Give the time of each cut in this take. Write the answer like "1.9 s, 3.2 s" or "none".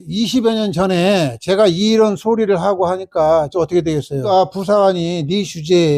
4.3 s